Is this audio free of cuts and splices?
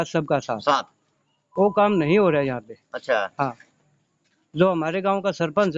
yes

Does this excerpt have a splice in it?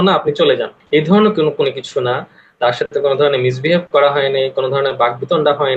no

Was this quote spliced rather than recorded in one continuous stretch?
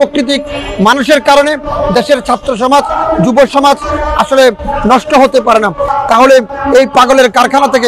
yes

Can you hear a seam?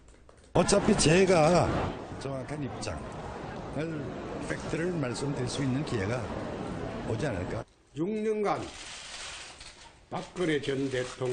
no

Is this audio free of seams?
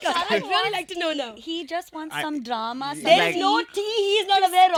yes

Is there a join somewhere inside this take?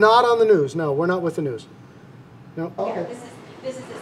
yes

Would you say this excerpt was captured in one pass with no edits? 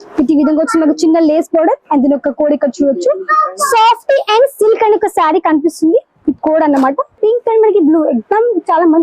no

